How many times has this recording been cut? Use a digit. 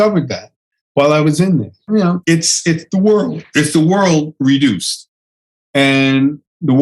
1